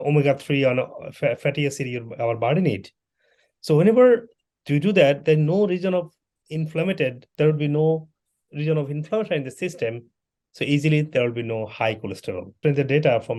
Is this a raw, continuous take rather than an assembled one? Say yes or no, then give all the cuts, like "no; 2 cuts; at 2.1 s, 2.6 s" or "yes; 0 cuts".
yes; 0 cuts